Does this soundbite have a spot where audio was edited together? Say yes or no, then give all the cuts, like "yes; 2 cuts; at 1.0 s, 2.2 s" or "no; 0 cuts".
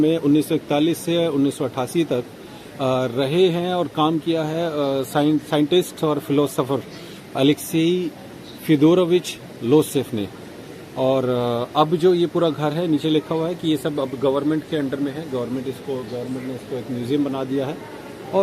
no; 0 cuts